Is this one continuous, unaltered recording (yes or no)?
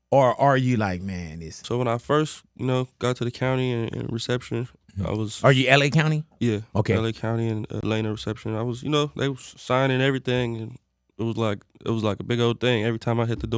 no